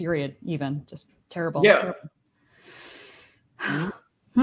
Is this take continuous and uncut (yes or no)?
yes